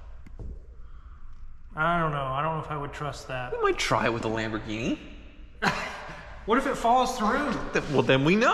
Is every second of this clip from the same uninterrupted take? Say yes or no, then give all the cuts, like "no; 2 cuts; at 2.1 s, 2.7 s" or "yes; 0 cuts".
yes; 0 cuts